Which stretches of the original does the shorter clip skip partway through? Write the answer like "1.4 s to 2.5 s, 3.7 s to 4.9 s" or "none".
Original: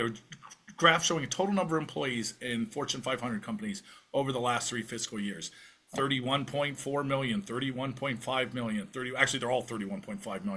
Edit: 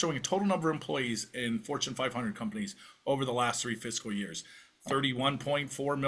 none

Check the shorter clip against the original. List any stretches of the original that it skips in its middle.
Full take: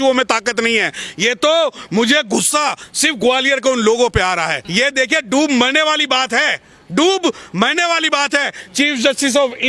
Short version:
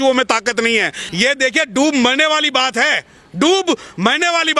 1.0 s to 4.6 s

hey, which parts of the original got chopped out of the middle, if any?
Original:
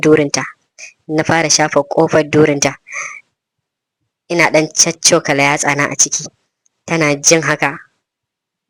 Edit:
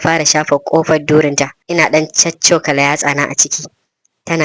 2.8 s to 4.2 s

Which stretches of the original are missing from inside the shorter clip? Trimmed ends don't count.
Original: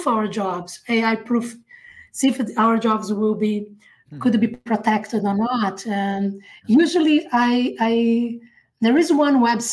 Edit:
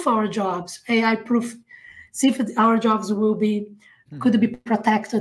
none

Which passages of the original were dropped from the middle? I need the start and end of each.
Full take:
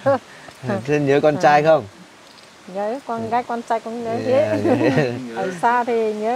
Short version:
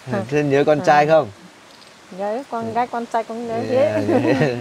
none

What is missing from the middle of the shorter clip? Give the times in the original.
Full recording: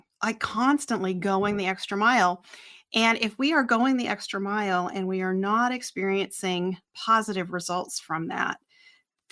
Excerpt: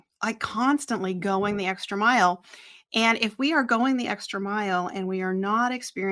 none

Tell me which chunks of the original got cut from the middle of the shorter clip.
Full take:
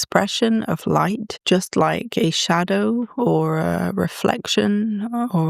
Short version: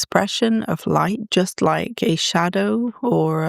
1.2 s to 1.4 s

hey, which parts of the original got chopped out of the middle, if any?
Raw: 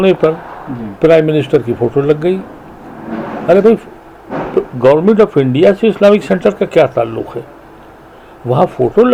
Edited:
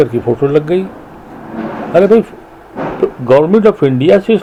none

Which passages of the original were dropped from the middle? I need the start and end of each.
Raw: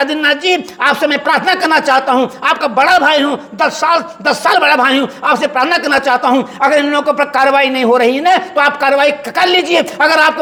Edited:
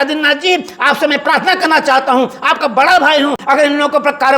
3.4 s to 6.5 s

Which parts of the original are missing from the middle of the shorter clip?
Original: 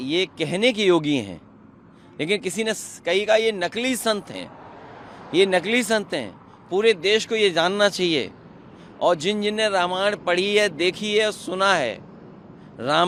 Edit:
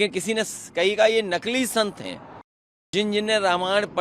5.2 s to 9.2 s

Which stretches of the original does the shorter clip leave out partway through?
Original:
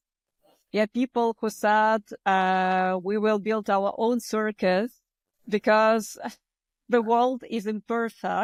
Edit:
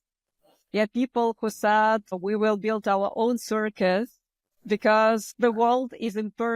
2.2 s to 3.0 s, 6.1 s to 6.8 s

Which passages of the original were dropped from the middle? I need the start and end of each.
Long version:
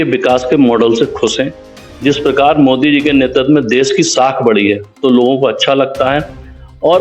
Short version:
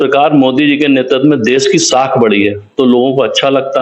none

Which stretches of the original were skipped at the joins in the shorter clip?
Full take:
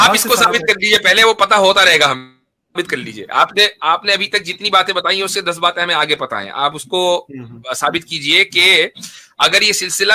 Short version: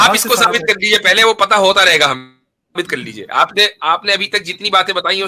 none

